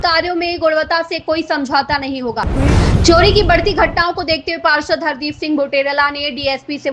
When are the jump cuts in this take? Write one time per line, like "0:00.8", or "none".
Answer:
0:02.5